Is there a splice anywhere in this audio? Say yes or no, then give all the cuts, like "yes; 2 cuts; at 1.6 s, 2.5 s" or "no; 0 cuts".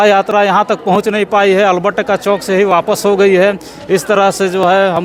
no; 0 cuts